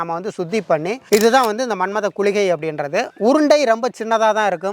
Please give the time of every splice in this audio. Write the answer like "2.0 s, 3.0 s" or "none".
1.0 s